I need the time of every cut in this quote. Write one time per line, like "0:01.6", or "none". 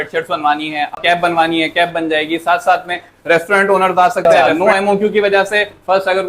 0:01.0
0:04.2